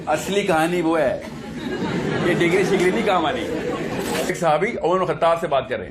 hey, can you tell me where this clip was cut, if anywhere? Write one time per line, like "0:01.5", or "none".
0:04.3